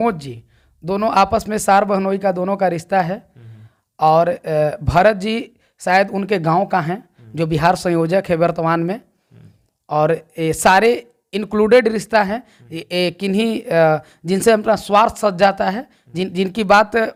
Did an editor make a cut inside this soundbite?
no; 0 cuts

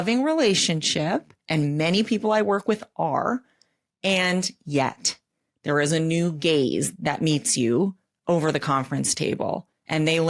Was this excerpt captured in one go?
yes; 0 cuts

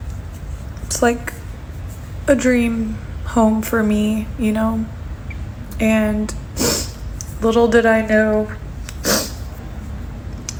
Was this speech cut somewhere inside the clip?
no; 0 cuts

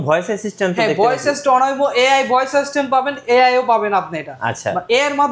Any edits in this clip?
no; 0 cuts

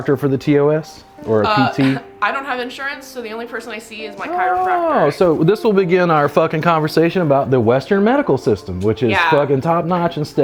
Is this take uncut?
yes; 0 cuts

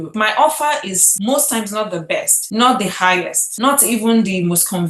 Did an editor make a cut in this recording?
no; 0 cuts

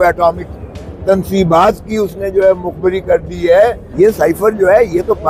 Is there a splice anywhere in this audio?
yes; 1 cut; at 3.8 s

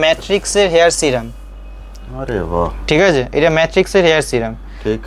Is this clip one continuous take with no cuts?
yes; 0 cuts

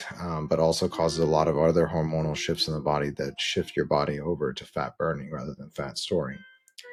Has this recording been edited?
no; 0 cuts

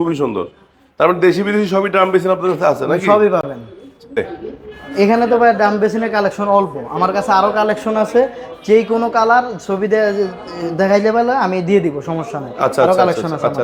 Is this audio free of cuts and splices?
yes; 0 cuts

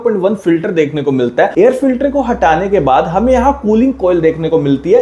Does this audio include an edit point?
yes; 1 cut; at 1.5 s

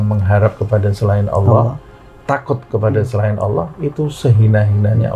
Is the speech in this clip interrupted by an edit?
no; 0 cuts

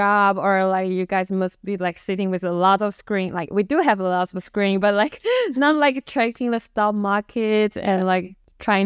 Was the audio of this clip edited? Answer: no; 0 cuts

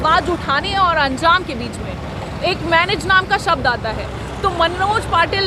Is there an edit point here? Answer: no; 0 cuts

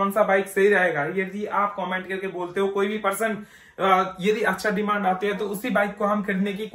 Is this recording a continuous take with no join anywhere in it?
yes; 0 cuts

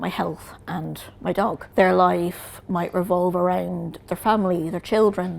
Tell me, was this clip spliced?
yes; 1 cut; at 1.6 s

